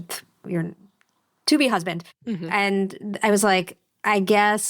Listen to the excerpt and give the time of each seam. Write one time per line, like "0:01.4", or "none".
0:02.1